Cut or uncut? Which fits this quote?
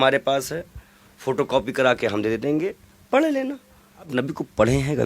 cut